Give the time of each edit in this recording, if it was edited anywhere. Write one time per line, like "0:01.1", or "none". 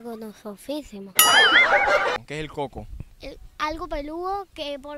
0:02.2